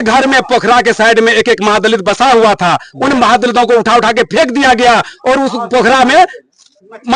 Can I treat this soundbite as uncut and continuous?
yes; 0 cuts

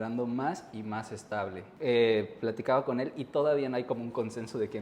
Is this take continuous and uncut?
yes; 0 cuts

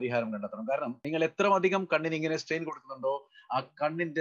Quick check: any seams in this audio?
yes; 1 cut; at 1.0 s

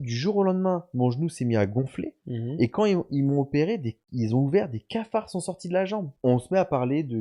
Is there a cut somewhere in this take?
yes; 1 cut; at 6.1 s

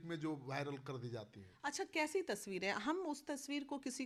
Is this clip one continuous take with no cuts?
yes; 0 cuts

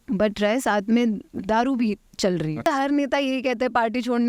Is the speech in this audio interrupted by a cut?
yes; 1 cut; at 2.6 s

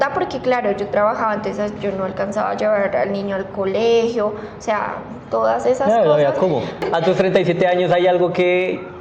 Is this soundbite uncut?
no; 1 cut; at 6.8 s

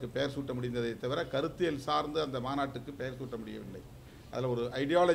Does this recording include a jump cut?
no; 0 cuts

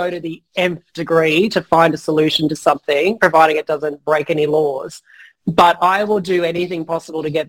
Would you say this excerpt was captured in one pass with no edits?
yes; 0 cuts

